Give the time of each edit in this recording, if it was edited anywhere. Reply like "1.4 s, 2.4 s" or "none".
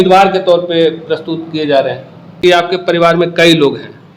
2.3 s